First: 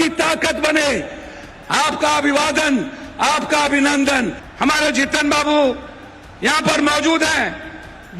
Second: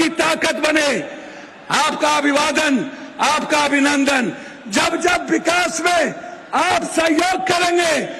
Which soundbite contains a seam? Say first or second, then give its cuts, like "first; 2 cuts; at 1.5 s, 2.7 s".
first; 1 cut; at 4.4 s